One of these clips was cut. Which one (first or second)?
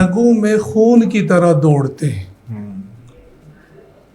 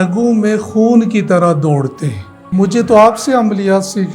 second